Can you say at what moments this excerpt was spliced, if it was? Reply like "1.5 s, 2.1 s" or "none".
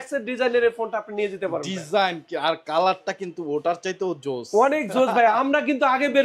none